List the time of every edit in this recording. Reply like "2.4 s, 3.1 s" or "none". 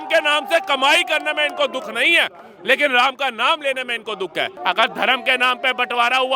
4.5 s